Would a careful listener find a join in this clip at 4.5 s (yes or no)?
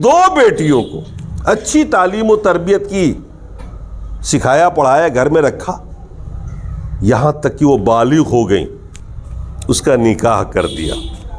no